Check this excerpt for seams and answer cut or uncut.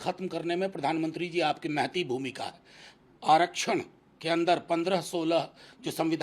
uncut